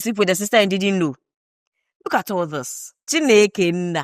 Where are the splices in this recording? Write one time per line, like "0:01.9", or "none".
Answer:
0:03.1